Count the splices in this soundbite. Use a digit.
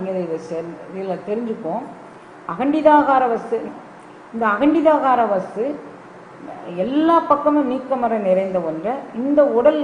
1